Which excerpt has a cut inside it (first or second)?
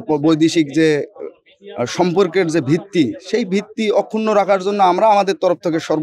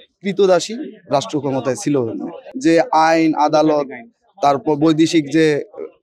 second